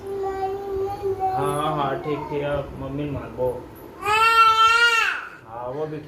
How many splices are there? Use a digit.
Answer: 1